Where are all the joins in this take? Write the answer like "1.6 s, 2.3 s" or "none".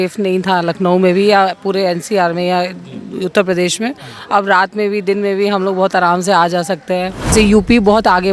7.3 s